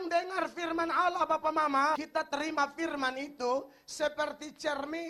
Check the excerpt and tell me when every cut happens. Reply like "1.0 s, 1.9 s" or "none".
2.0 s